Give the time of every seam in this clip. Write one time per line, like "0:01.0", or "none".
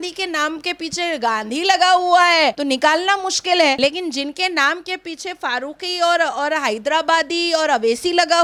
none